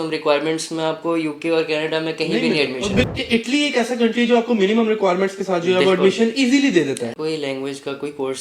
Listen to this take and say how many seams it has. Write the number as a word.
two